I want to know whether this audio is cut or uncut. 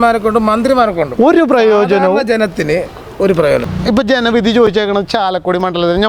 cut